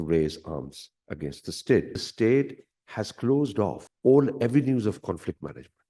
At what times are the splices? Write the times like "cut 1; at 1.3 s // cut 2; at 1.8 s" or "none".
cut 1; at 2.0 s // cut 2; at 3.9 s